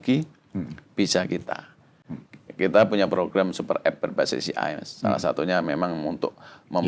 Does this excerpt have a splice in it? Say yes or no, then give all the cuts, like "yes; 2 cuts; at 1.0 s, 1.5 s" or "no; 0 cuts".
no; 0 cuts